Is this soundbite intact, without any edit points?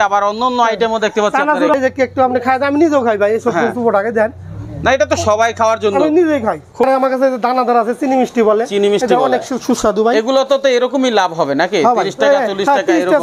no; 2 cuts; at 1.7 s, 6.8 s

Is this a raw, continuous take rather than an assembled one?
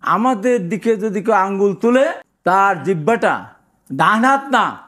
no; 1 cut; at 2.3 s

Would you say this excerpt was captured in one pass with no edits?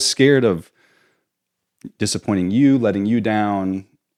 yes; 0 cuts

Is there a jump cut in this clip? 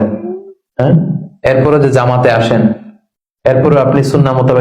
no; 0 cuts

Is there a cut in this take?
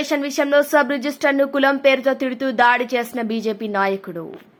no; 0 cuts

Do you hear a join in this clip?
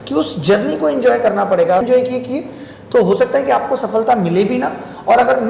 yes; 1 cut; at 1.8 s

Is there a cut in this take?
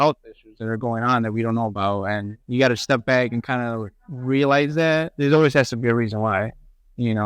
yes; 2 cuts; at 2.3 s, 5.1 s

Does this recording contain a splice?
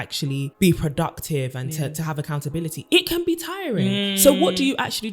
no; 0 cuts

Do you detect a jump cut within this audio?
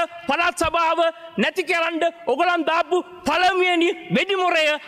no; 0 cuts

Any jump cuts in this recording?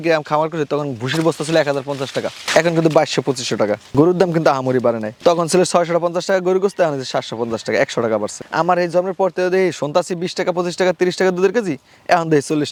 no; 0 cuts

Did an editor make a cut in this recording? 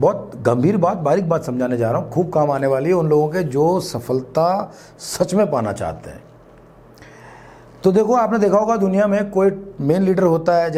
no; 0 cuts

